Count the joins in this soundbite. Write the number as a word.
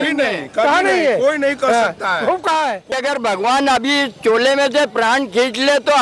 one